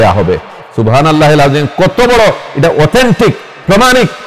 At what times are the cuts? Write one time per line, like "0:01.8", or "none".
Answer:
none